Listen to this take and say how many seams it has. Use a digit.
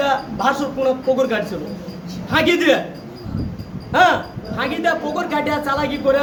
0